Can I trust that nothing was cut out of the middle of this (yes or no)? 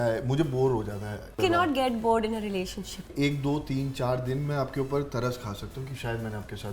no